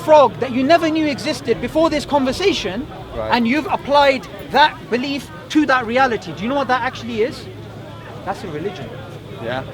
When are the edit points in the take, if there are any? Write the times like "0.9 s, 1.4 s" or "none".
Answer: none

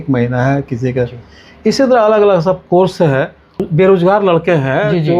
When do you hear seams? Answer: 3.6 s

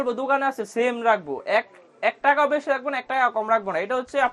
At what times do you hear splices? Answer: none

